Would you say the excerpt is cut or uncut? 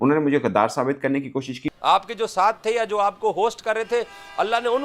uncut